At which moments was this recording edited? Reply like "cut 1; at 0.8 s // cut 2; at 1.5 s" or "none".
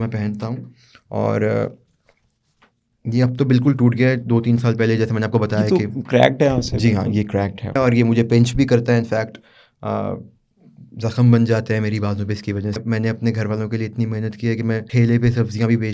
cut 1; at 7.8 s // cut 2; at 12.8 s // cut 3; at 14.9 s